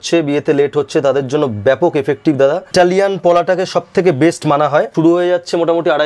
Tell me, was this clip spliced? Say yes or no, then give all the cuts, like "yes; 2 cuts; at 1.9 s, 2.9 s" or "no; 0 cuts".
yes; 2 cuts; at 2.7 s, 4.9 s